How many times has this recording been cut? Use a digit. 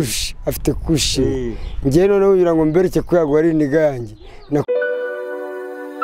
1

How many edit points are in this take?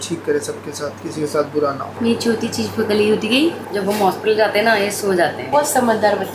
2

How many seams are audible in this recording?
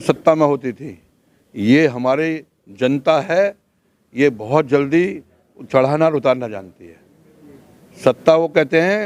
0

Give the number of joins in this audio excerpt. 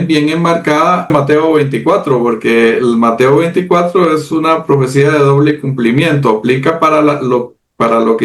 1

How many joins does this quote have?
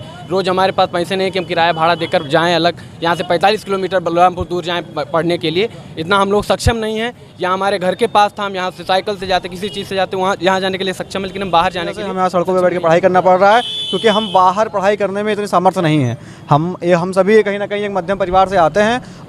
1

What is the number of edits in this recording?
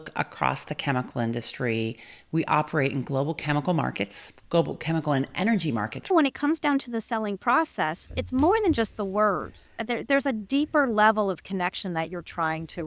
1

